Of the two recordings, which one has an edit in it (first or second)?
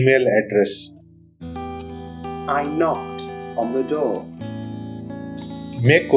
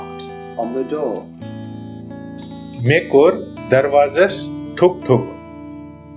second